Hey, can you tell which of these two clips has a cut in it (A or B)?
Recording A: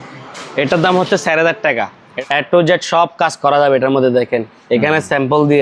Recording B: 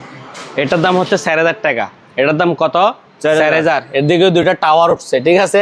A